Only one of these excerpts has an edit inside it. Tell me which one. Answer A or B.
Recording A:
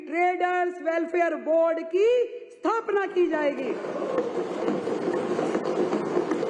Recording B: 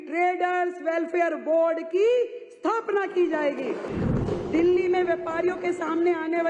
B